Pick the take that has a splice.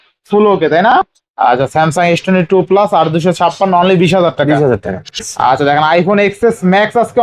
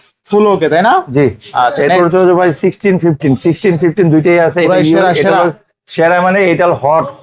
first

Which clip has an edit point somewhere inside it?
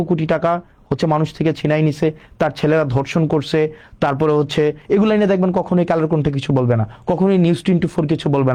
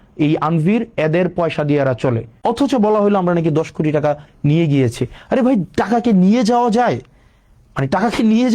second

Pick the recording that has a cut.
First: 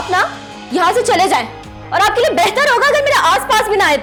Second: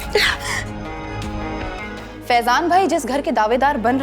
second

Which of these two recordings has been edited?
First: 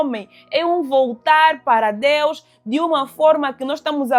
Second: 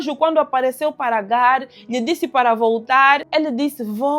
second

